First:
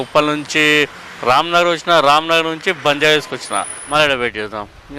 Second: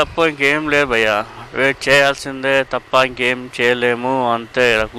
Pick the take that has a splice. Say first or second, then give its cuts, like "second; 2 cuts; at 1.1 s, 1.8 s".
first; 1 cut; at 3.8 s